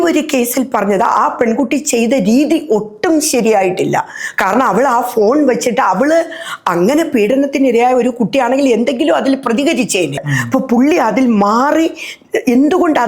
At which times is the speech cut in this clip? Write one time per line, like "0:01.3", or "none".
0:10.1